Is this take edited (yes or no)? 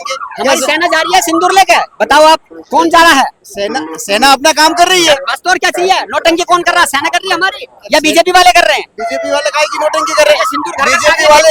no